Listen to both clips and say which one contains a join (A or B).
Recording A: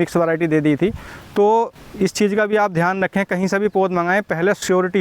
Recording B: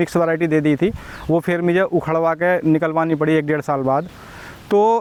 A